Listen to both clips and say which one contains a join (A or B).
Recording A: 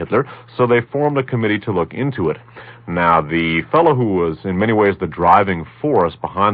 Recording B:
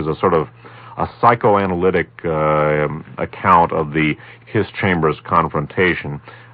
A